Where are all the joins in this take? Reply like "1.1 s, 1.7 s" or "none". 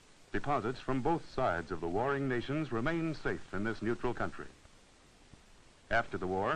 5.3 s